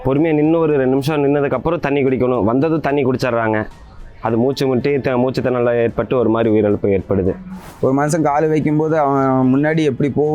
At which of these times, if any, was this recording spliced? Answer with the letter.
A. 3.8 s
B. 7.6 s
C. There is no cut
B